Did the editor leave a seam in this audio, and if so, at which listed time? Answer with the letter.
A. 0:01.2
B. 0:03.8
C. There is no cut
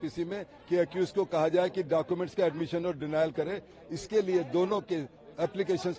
C